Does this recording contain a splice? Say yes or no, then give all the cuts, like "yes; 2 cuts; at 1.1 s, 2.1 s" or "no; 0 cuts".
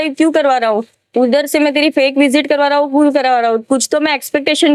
no; 0 cuts